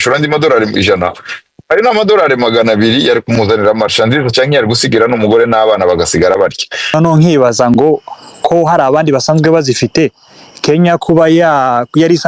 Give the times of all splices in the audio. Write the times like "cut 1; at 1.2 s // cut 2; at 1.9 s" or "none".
cut 1; at 6.9 s

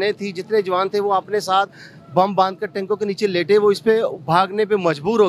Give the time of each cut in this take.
none

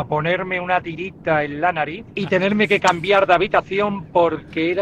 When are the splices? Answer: cut 1; at 2.0 s

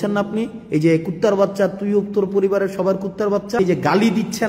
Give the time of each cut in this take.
cut 1; at 3.6 s

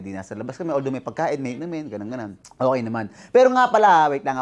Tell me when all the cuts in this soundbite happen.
cut 1; at 2.4 s

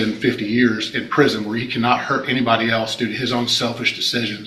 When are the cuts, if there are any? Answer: none

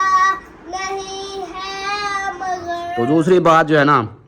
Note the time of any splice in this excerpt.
cut 1; at 2.9 s

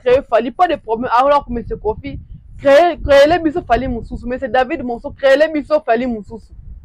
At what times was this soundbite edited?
none

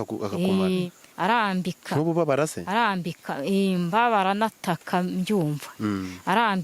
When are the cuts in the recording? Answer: cut 1; at 1.0 s

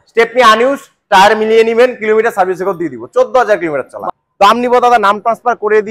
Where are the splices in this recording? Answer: cut 1; at 4.0 s

